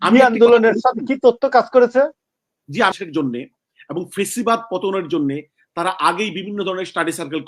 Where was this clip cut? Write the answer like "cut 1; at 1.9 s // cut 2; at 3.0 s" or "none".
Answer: cut 1; at 2.9 s